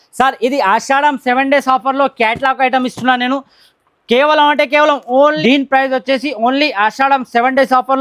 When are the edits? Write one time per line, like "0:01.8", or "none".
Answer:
0:05.4